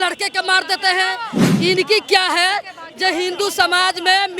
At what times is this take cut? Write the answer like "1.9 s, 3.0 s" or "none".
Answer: 1.4 s